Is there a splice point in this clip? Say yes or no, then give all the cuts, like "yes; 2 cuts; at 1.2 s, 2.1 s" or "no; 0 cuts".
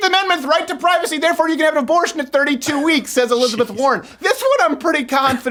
no; 0 cuts